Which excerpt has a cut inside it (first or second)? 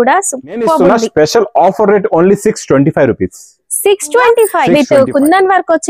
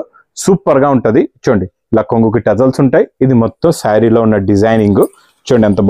first